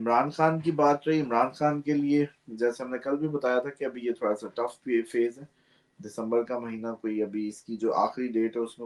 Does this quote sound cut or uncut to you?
uncut